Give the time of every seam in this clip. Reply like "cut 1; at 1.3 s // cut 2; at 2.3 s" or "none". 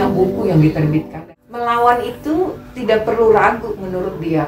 cut 1; at 1.2 s